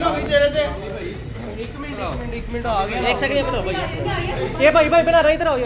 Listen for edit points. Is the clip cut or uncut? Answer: uncut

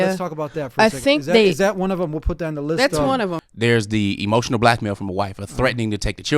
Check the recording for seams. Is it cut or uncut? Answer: cut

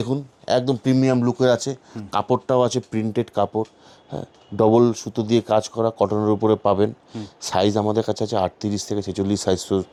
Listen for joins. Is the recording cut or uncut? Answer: uncut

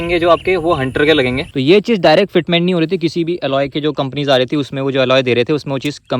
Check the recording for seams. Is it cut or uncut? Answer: cut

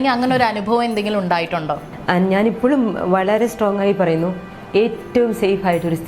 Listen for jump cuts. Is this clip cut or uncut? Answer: cut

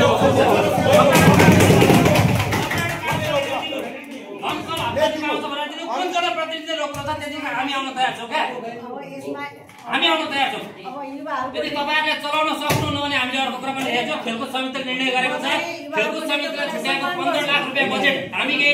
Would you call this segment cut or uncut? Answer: uncut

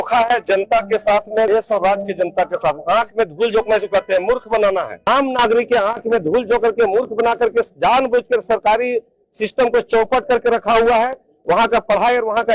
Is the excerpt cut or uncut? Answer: cut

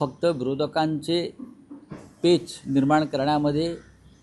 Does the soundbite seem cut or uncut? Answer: uncut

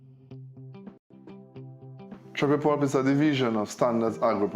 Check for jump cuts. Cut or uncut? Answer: cut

